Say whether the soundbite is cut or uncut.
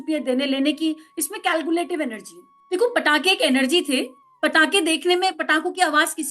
cut